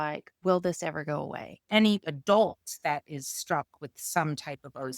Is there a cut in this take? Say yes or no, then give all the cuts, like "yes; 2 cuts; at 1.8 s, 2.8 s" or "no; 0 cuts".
yes; 1 cut; at 1.7 s